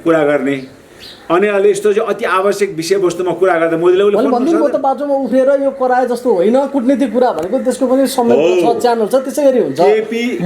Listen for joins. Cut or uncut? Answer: uncut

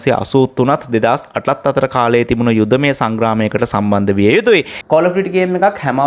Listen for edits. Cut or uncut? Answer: cut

